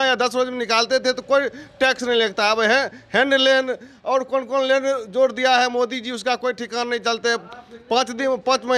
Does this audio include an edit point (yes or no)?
no